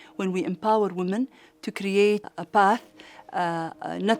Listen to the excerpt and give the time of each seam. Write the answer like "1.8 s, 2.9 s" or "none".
2.3 s